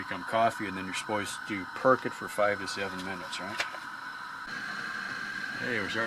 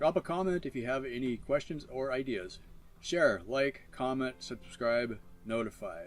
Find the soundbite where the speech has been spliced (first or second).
first